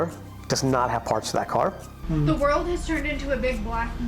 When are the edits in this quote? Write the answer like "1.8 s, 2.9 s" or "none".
2.0 s